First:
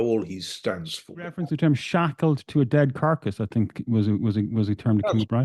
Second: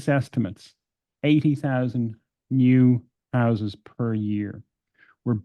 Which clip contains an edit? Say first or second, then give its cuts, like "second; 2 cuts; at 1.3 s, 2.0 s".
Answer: first; 1 cut; at 1.4 s